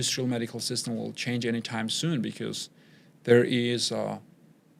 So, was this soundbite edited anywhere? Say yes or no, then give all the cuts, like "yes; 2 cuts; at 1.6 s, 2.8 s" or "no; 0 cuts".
no; 0 cuts